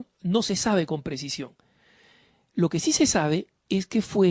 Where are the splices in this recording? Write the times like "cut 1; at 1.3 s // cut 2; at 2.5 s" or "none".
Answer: cut 1; at 2.7 s